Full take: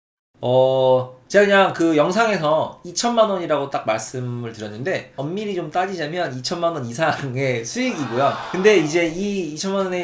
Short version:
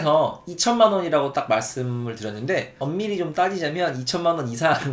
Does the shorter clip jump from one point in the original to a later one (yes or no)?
no